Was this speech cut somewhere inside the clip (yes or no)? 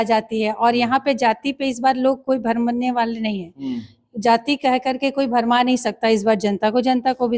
no